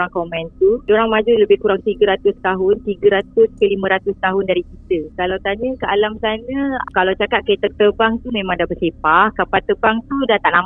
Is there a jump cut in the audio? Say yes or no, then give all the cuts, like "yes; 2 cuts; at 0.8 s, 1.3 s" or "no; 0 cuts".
no; 0 cuts